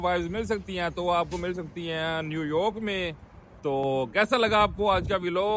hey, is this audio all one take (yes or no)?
yes